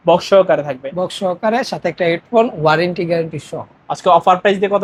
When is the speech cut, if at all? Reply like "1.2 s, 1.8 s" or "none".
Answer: none